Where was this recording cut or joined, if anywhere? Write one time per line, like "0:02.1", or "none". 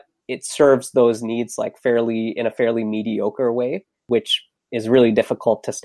none